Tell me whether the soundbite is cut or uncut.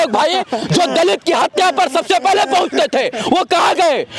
uncut